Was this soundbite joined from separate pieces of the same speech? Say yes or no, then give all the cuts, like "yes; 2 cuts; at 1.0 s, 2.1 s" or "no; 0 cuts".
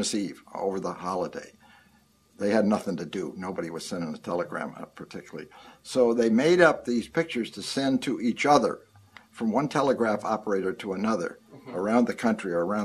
yes; 1 cut; at 7.3 s